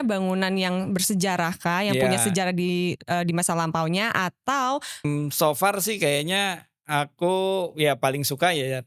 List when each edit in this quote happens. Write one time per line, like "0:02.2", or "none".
0:05.0